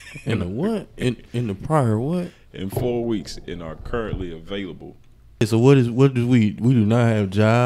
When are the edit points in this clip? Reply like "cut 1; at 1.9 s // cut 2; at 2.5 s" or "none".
cut 1; at 5.4 s